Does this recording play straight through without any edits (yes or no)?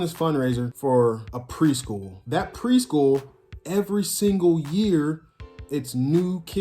no